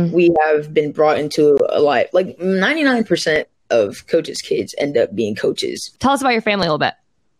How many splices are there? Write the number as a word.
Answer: one